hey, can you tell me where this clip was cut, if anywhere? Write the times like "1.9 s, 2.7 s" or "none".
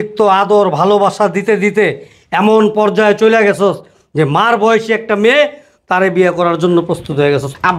none